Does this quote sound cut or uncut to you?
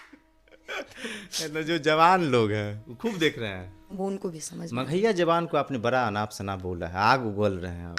cut